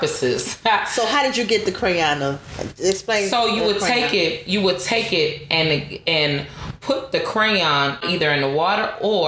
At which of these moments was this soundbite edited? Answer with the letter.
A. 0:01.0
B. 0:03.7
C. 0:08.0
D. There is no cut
C